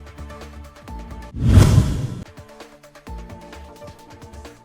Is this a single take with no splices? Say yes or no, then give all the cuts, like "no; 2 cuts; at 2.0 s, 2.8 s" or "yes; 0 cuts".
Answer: yes; 0 cuts